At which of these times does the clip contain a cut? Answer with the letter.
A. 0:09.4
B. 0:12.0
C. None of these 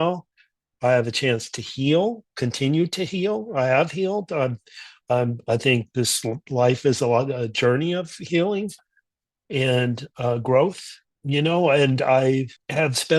C